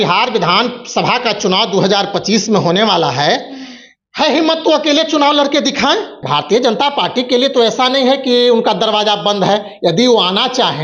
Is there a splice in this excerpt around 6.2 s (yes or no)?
yes